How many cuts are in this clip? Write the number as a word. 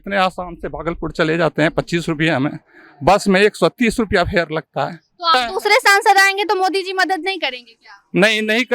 one